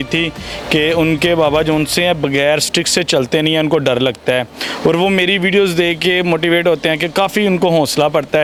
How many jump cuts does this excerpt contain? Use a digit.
0